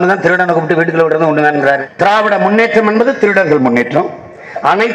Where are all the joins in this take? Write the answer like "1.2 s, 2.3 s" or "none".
1.9 s